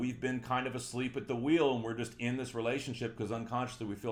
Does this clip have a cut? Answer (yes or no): no